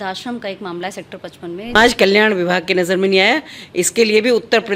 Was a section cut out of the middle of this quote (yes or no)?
yes